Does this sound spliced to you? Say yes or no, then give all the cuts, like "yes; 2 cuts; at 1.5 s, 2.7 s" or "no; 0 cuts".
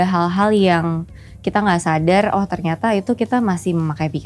no; 0 cuts